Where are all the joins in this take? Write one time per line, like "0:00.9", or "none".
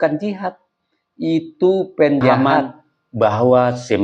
0:02.4